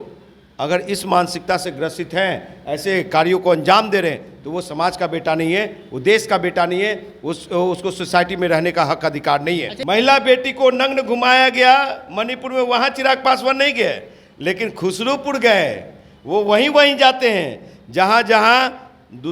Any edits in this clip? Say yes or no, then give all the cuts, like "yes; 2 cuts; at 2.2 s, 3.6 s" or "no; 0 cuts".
yes; 1 cut; at 9.7 s